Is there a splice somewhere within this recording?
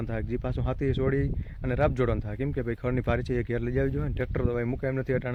no; 0 cuts

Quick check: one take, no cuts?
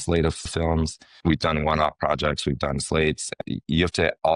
no; 2 cuts; at 1.0 s, 3.4 s

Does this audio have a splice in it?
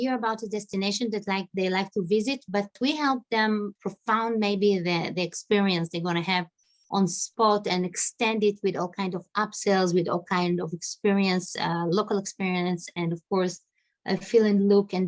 yes; 2 cuts; at 2.7 s, 3.8 s

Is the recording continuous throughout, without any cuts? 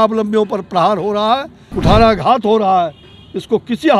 no; 1 cut; at 1.6 s

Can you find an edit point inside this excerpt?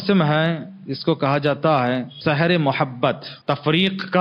yes; 2 cuts; at 2.1 s, 3.3 s

